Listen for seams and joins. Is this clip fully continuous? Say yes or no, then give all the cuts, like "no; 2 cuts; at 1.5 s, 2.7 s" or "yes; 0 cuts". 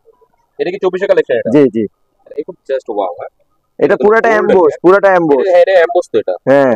yes; 0 cuts